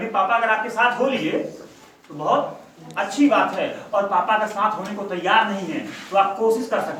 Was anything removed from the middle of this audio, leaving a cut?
no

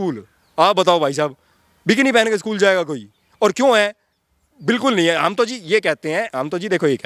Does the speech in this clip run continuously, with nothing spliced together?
yes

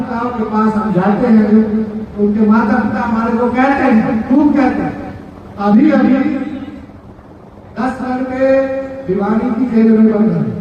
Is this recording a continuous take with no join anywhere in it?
yes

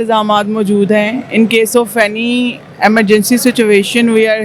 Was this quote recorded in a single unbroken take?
yes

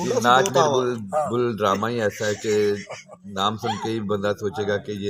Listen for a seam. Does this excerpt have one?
no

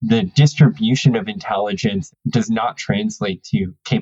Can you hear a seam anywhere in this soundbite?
no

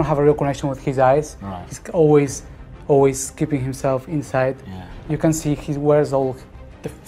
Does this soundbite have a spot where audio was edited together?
no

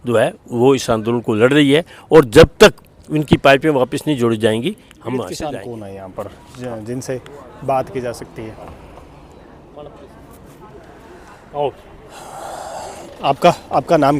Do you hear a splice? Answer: yes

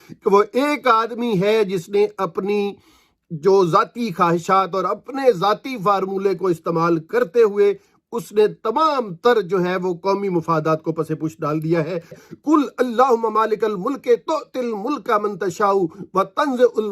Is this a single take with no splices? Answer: no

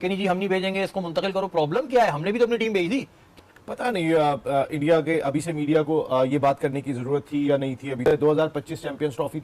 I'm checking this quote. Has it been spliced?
yes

